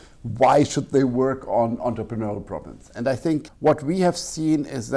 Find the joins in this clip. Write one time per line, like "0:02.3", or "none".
none